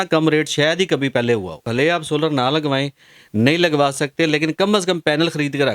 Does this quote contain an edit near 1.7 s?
yes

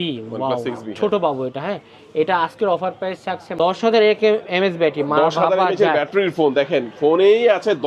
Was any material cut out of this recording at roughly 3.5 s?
yes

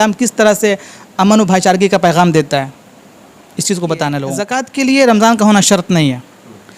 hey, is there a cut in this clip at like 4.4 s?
yes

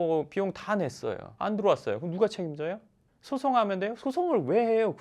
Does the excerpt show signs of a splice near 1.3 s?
yes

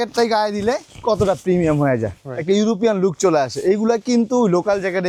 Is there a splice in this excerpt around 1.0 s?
no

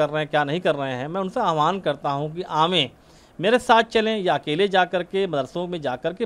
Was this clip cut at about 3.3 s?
no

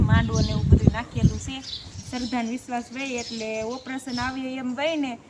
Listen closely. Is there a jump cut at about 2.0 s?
yes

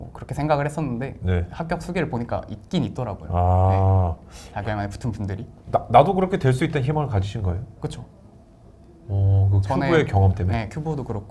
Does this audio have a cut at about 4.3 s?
no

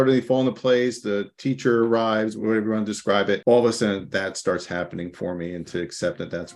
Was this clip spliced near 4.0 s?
yes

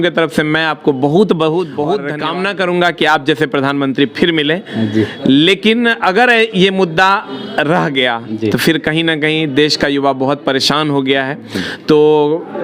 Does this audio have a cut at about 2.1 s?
yes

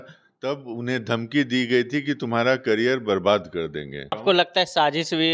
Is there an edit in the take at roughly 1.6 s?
no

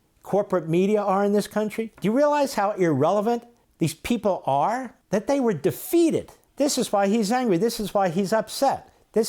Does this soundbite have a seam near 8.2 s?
no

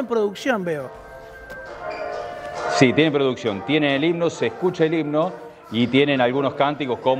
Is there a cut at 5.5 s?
no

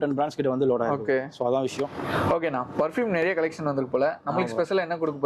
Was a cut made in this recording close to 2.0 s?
no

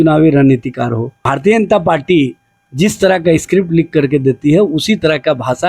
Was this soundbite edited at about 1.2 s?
yes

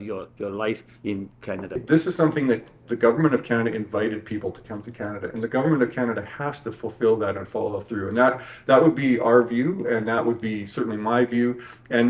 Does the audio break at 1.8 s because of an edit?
yes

